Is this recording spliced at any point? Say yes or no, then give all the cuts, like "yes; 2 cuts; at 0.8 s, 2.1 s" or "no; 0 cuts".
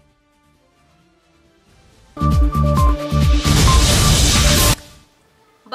no; 0 cuts